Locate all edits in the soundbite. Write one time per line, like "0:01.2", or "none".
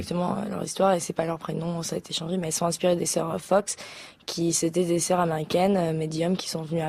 0:03.7